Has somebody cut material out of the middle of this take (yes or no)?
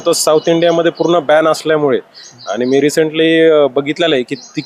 no